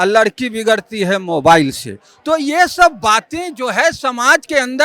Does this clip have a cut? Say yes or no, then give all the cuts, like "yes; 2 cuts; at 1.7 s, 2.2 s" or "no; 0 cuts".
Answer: no; 0 cuts